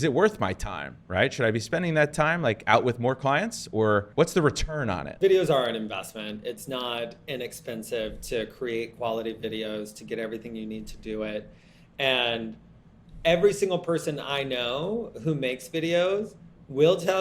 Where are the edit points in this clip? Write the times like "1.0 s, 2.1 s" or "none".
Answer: 4.1 s, 5.1 s